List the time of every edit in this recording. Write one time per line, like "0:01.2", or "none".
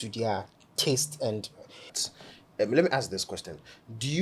0:02.0